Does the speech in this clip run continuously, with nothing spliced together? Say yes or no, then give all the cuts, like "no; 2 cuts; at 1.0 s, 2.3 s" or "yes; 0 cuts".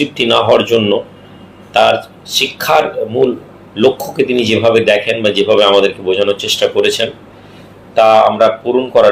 yes; 0 cuts